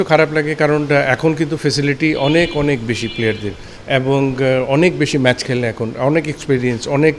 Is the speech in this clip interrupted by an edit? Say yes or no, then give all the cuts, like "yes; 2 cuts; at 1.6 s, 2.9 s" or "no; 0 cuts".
no; 0 cuts